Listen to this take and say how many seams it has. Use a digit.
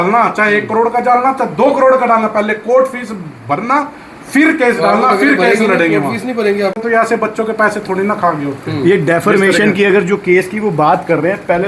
0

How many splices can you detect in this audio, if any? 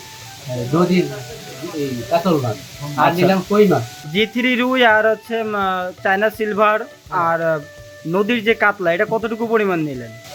0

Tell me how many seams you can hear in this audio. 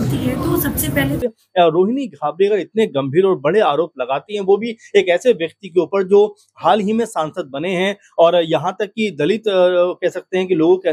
1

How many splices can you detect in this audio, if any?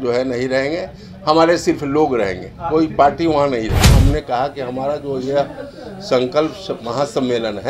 1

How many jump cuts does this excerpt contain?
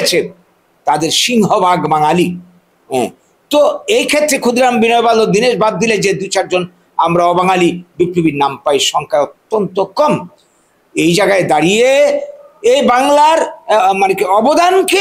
0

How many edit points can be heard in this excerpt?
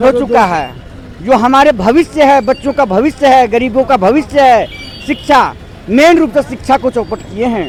0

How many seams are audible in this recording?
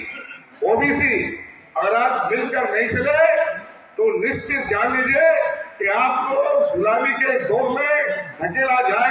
0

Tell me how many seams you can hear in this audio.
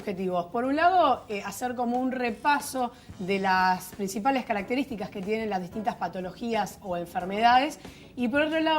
1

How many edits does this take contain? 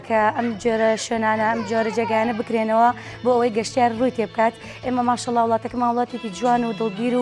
0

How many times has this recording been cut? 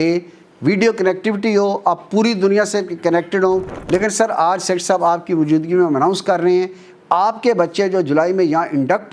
1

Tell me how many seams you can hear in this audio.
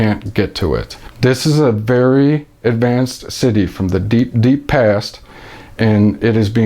1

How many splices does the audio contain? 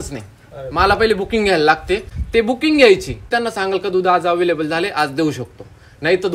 2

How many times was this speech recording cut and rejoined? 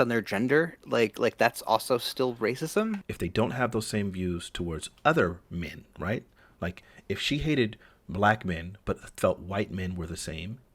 1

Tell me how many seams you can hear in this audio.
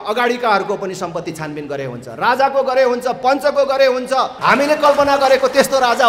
1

